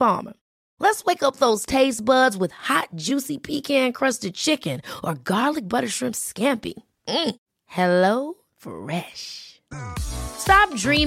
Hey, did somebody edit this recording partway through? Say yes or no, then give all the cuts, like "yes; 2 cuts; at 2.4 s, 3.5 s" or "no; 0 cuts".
no; 0 cuts